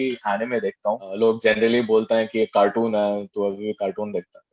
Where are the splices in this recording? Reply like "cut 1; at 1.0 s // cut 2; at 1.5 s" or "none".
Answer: cut 1; at 1.1 s